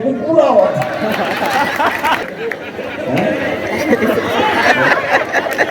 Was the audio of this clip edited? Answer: yes; 1 cut; at 2.2 s

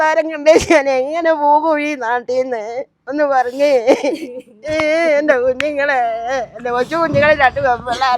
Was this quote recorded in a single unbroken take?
yes; 0 cuts

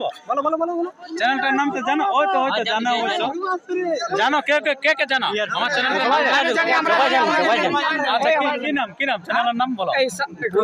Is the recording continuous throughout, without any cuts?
yes; 0 cuts

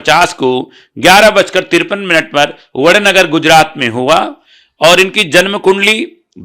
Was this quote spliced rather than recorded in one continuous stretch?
no; 0 cuts

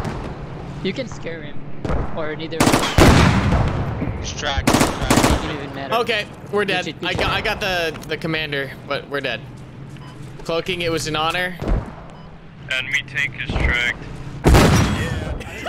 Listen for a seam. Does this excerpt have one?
yes; 1 cut; at 14.4 s

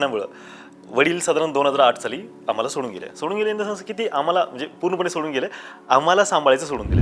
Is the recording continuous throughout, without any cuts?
yes; 0 cuts

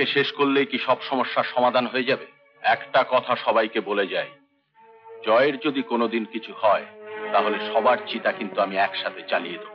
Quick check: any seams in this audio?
no; 0 cuts

